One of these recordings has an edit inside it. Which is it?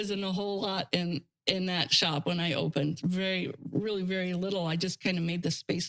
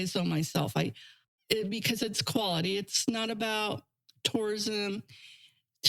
second; 1 cut; at 1.2 s

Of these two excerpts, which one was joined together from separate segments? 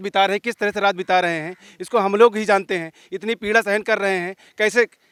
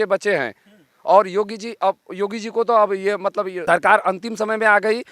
second; 1 cut; at 3.6 s

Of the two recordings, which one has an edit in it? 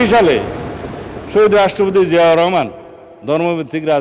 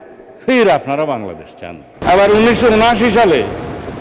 second; 1 cut; at 2.0 s

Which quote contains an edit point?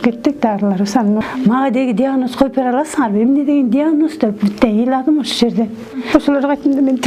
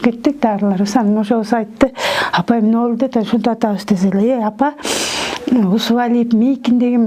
first; 2 cuts; at 1.2 s, 6.0 s

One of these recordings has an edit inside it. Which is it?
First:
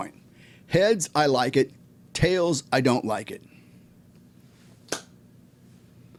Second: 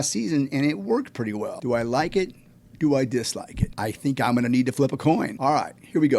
second; 3 cuts; at 1.6 s, 3.7 s, 5.3 s

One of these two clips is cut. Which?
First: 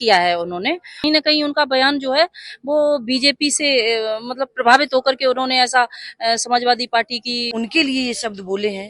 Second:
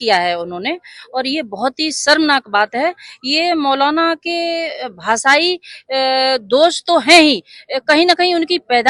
first; 2 cuts; at 1.0 s, 7.5 s

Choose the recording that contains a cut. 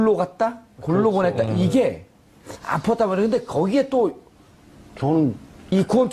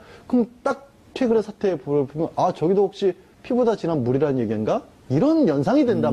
first; 1 cut; at 2.0 s

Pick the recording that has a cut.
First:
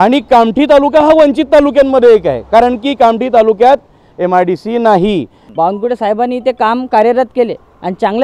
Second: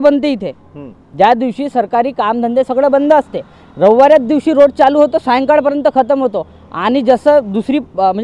first; 1 cut; at 5.4 s

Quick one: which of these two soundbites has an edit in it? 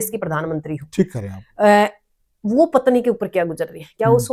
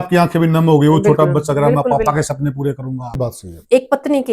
second; 1 cut; at 3.2 s

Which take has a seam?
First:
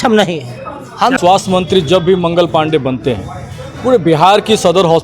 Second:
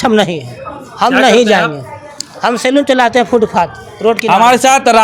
first; 1 cut; at 1.2 s

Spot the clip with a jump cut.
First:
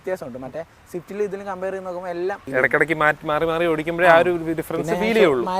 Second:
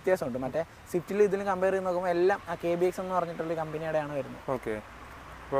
first; 1 cut; at 2.4 s

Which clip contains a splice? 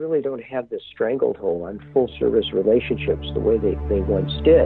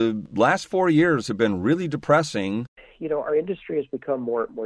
second; 1 cut; at 2.6 s

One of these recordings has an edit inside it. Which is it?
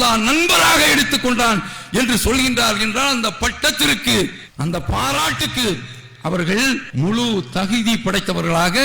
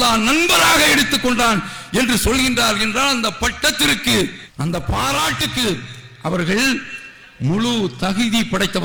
first; 1 cut; at 6.9 s

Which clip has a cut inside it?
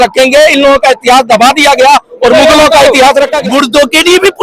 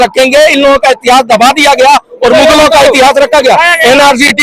first; 1 cut; at 3.4 s

